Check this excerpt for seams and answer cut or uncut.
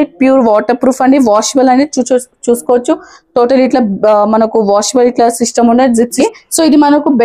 cut